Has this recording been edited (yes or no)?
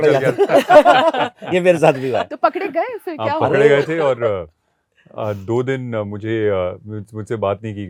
no